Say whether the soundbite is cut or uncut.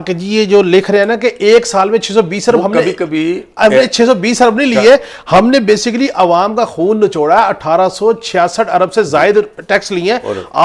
uncut